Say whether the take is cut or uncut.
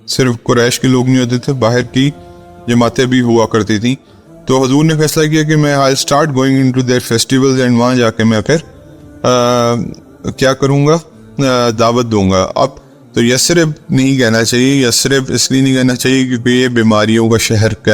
cut